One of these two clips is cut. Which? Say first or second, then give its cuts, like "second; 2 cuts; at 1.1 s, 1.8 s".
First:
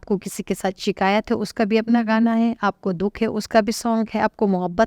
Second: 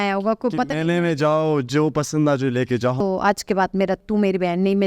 second; 2 cuts; at 3.0 s, 4.0 s